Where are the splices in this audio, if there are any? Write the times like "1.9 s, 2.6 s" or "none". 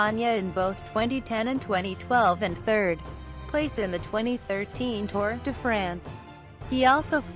5.4 s